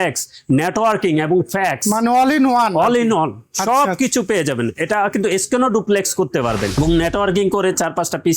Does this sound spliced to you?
yes; 1 cut; at 6.7 s

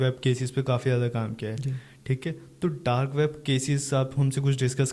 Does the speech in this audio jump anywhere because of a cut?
no; 0 cuts

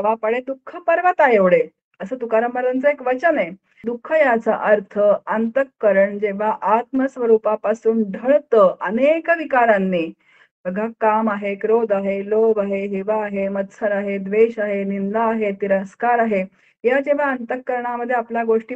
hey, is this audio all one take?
no; 1 cut; at 3.9 s

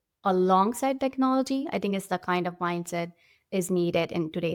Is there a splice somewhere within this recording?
no; 0 cuts

